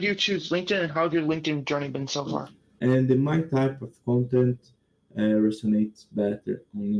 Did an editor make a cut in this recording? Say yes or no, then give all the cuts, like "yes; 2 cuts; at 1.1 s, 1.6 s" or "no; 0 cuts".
yes; 1 cut; at 2.6 s